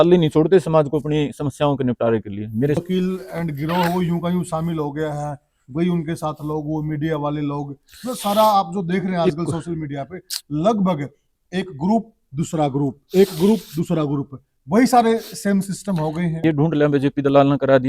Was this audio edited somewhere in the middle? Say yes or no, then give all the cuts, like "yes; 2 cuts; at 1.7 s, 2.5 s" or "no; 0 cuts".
yes; 2 cuts; at 2.8 s, 16.4 s